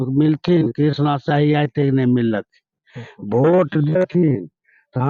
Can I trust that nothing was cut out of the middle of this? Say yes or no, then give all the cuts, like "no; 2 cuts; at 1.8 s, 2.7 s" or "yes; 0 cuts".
yes; 0 cuts